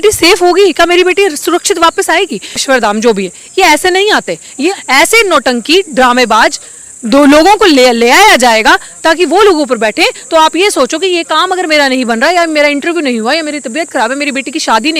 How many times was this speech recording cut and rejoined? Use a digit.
2